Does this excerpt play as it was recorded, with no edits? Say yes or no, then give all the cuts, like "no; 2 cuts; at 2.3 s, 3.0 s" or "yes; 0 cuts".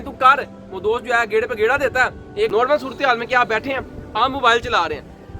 no; 1 cut; at 2.5 s